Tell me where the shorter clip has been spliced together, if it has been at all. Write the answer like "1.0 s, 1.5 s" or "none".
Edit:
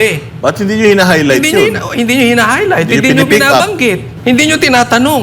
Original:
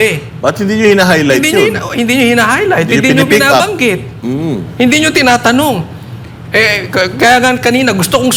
4.1 s